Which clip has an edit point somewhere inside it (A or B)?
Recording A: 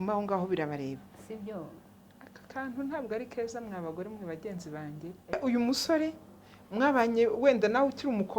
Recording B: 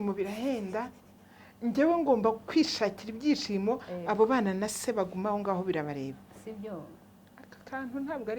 A